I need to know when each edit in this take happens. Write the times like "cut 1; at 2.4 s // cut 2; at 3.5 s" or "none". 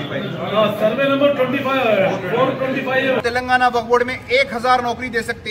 cut 1; at 3.2 s